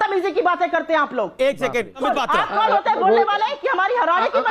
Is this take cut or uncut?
cut